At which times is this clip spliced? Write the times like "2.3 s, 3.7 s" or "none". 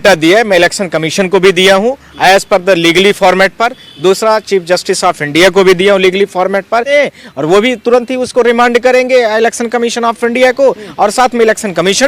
6.9 s